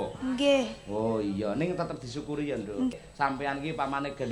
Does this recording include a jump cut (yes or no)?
yes